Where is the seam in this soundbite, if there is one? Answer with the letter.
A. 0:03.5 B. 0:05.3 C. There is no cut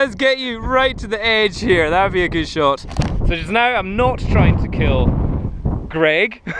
C